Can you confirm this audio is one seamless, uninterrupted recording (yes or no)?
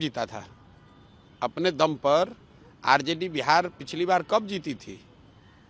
yes